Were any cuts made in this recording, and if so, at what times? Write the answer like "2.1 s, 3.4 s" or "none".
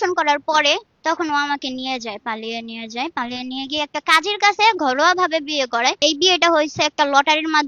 0.9 s, 6.0 s